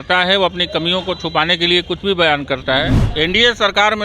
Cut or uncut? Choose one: cut